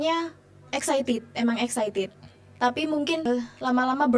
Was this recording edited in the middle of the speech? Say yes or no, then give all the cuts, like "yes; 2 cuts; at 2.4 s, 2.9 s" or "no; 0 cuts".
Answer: yes; 1 cut; at 3.3 s